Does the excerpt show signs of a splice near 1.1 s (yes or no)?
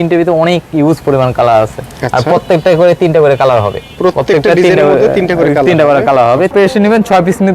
no